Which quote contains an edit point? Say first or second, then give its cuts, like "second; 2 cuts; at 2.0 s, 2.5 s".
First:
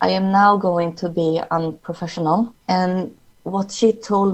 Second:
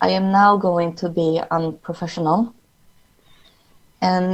first; 1 cut; at 2.6 s